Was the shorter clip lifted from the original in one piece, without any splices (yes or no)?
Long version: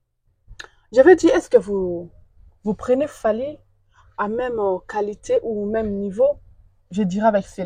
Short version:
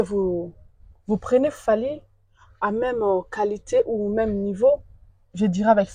yes